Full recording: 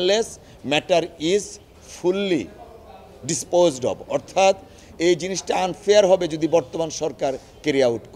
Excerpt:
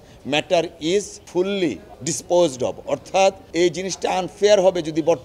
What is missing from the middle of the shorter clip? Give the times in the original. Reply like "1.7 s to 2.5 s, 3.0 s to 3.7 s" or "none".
1.6 s to 1.9 s, 2.6 s to 3.1 s, 4.7 s to 4.9 s